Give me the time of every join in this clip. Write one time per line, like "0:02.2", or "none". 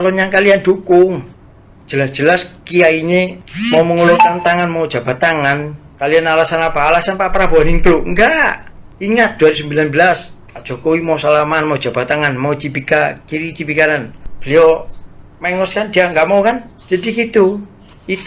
none